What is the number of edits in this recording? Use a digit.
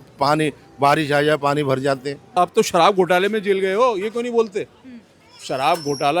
1